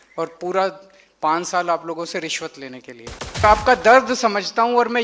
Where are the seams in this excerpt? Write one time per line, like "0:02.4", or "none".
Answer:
0:03.4